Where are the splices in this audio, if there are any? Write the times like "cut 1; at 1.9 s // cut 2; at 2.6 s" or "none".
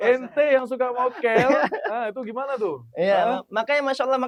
none